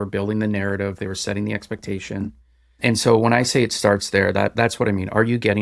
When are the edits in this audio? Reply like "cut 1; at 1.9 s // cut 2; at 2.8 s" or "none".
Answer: none